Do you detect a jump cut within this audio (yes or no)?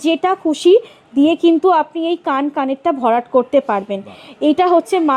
no